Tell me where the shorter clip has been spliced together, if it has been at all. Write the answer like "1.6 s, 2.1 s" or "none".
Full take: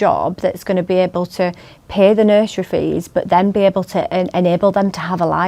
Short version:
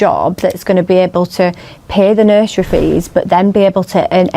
none